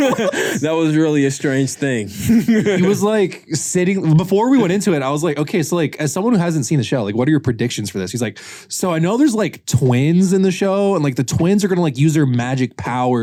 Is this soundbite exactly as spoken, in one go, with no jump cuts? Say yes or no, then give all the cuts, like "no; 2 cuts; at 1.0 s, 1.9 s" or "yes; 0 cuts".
yes; 0 cuts